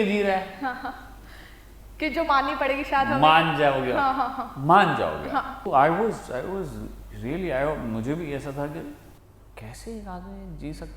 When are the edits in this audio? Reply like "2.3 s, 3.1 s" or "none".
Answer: 5.6 s